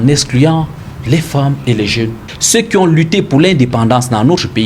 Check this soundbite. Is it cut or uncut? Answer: cut